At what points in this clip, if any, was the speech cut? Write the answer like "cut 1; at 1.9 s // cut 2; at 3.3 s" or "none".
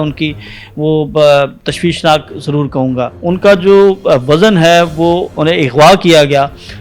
cut 1; at 3.2 s // cut 2; at 5.3 s